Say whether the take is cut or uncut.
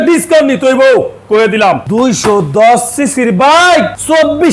cut